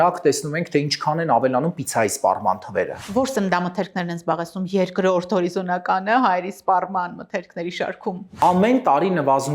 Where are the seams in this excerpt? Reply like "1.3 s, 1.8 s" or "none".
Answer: 3.0 s, 8.3 s

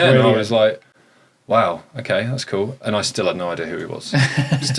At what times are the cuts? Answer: none

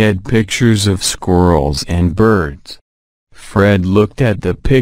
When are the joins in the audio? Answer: 1.0 s

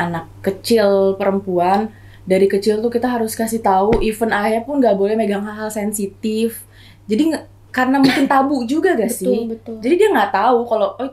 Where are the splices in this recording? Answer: none

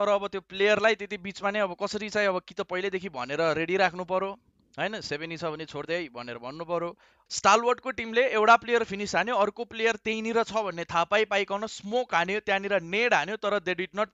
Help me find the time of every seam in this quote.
7.1 s

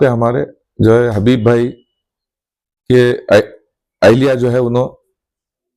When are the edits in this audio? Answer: none

